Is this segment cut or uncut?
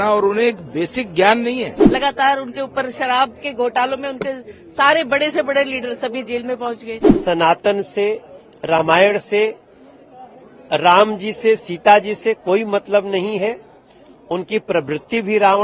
cut